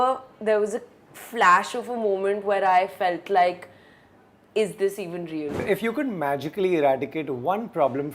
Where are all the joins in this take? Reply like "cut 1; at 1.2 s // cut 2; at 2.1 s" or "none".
cut 1; at 5.6 s